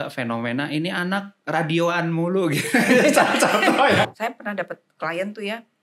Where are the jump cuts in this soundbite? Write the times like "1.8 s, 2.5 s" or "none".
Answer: 4.1 s